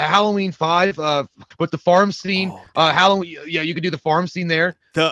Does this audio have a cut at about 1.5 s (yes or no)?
yes